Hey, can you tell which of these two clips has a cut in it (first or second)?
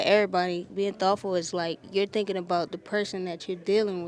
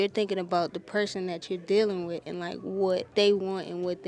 second